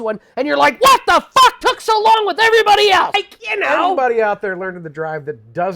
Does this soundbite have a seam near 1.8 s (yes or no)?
no